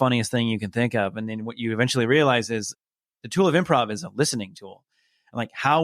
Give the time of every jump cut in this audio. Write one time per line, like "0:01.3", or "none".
0:02.8